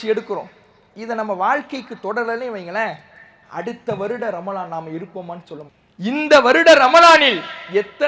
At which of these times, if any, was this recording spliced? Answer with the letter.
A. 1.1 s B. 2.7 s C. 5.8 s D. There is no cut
C